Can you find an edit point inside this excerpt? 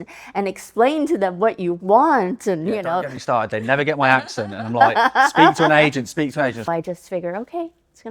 yes; 1 cut; at 6.6 s

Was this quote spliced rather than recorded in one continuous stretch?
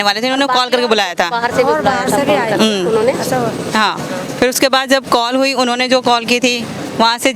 no; 0 cuts

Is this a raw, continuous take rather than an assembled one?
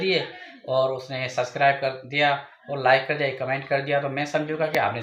yes; 0 cuts

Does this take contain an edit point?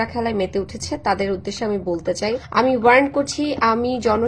yes; 1 cut; at 2.4 s

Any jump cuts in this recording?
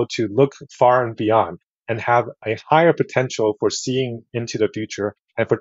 no; 0 cuts

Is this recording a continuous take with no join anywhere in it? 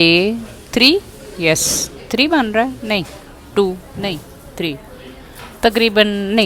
yes; 0 cuts

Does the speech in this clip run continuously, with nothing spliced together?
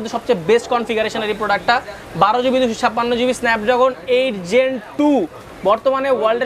yes; 0 cuts

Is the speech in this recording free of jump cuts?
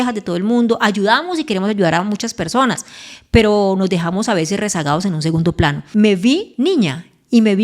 no; 2 cuts; at 5.8 s, 6.5 s

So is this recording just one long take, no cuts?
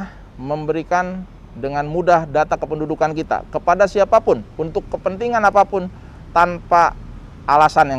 yes; 0 cuts

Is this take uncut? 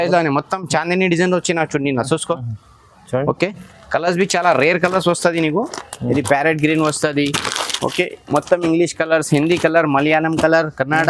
yes; 0 cuts

